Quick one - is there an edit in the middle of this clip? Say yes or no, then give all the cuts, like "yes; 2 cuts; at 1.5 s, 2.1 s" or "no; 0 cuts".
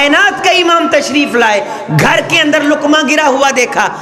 no; 0 cuts